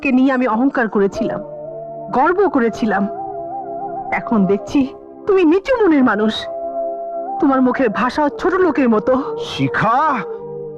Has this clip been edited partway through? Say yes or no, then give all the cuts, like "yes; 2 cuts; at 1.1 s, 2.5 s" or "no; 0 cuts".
no; 0 cuts